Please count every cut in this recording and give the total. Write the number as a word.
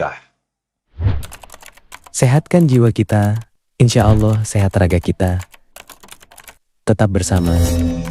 one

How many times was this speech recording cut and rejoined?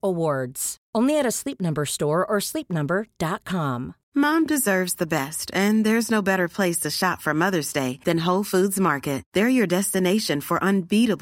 one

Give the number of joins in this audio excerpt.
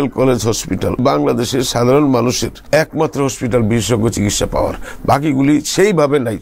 two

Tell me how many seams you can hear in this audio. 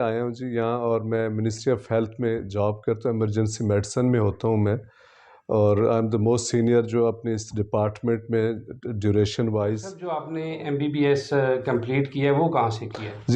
one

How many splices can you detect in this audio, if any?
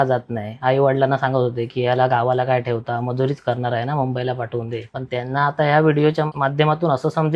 two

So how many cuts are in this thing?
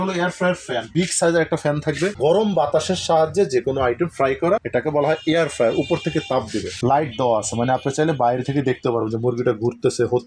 two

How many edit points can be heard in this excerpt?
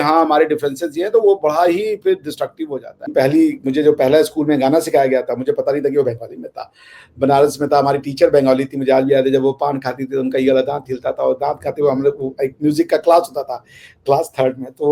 one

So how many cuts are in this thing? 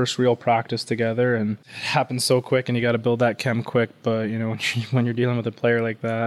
one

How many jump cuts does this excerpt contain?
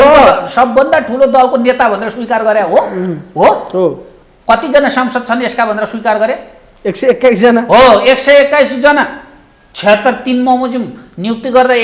zero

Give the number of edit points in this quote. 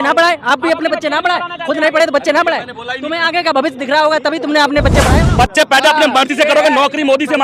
one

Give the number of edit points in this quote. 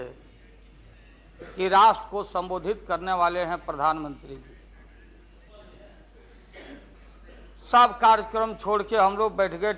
one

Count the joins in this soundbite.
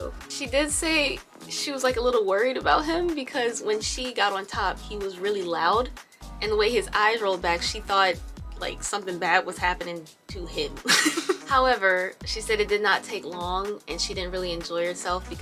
one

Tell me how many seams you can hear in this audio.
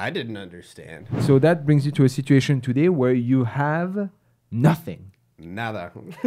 one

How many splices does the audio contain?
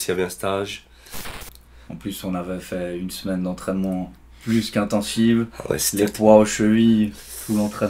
one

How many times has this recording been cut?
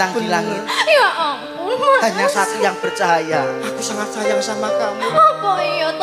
zero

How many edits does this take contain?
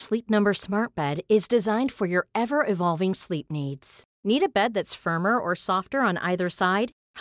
zero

